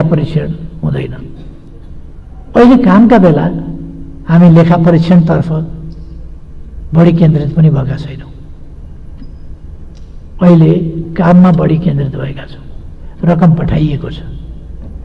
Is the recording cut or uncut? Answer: uncut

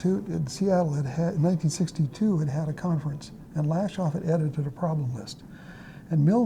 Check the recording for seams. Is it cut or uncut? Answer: uncut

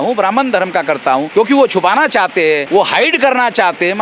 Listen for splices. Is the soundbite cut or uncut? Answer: cut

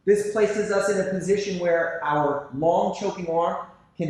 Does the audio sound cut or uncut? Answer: uncut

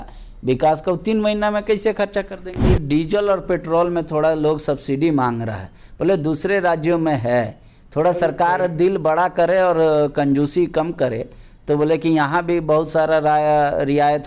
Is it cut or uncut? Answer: cut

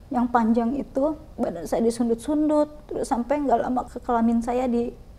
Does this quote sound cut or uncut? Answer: cut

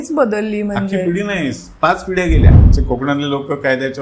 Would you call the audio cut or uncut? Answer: cut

